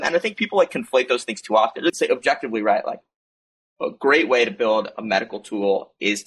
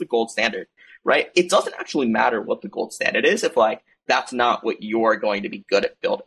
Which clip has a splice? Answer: first; 1 cut; at 2.0 s

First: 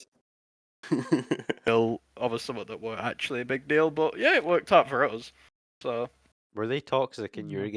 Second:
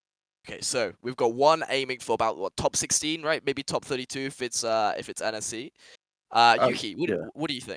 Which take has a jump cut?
first; 1 cut; at 1.7 s

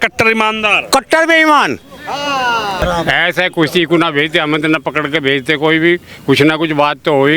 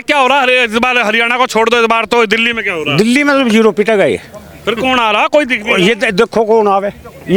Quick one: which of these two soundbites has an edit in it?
first; 1 cut; at 2.8 s

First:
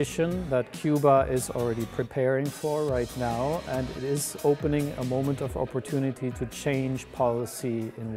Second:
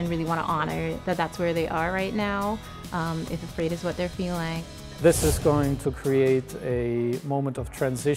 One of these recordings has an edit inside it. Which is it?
second; 1 cut; at 4.7 s

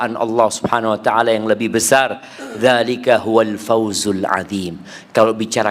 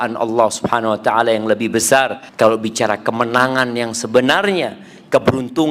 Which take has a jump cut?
second; 1 cut; at 2.2 s

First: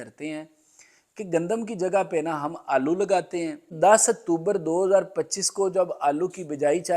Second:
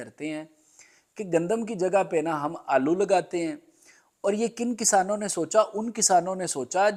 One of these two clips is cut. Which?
first; 1 cut; at 3.7 s

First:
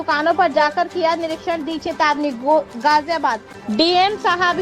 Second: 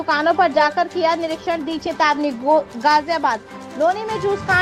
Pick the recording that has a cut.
first; 1 cut; at 3.6 s

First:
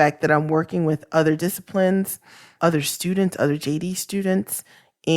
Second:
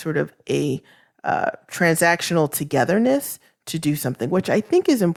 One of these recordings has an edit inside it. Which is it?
first; 1 cut; at 2.5 s

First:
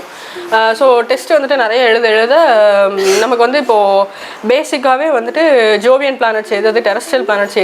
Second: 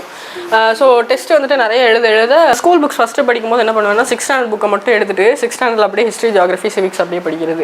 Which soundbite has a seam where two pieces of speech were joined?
second; 1 cut; at 2.5 s

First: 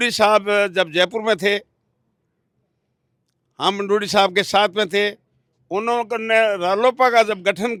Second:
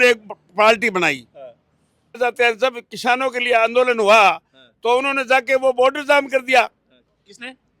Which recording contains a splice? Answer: second; 1 cut; at 2.2 s

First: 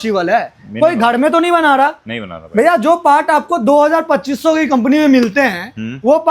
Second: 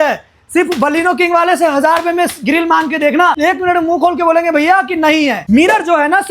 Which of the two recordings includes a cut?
second; 2 cuts; at 3.4 s, 5.4 s

